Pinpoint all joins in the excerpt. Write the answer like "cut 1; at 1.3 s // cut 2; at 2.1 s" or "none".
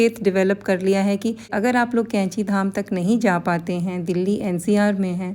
cut 1; at 1.5 s